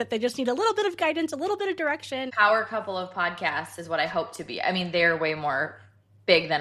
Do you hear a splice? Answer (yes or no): no